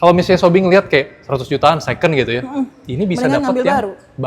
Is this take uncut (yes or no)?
yes